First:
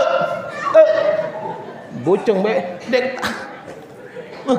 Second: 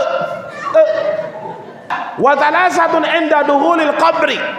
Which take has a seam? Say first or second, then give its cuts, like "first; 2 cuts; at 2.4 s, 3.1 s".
second; 1 cut; at 1.9 s